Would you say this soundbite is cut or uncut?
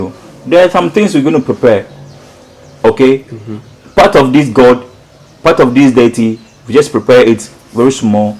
uncut